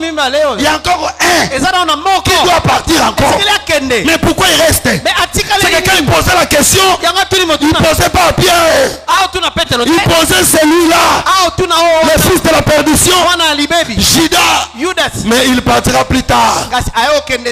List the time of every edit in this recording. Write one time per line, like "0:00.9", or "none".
none